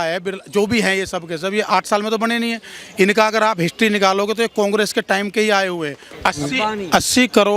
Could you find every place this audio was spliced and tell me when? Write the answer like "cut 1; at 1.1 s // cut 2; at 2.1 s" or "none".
cut 1; at 6.0 s